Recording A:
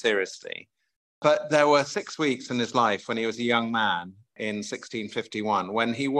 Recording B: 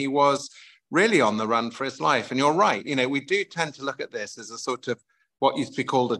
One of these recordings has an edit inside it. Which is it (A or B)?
A